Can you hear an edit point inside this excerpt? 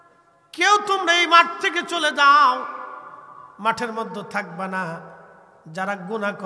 no; 0 cuts

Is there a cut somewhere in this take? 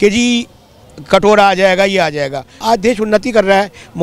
yes; 1 cut; at 2.6 s

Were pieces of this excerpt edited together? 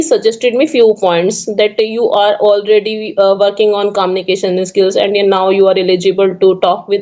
no; 0 cuts

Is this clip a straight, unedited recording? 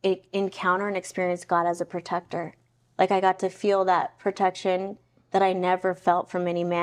yes; 0 cuts

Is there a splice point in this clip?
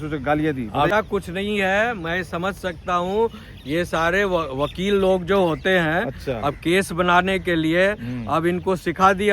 yes; 1 cut; at 0.9 s

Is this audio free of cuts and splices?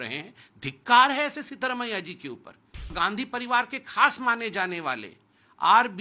no; 1 cut; at 2.9 s

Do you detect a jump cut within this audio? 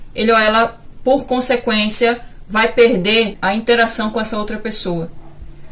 yes; 1 cut; at 3.4 s

